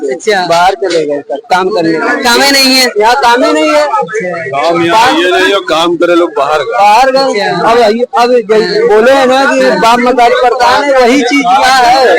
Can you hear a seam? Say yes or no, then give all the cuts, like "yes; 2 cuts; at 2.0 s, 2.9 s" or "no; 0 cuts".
no; 0 cuts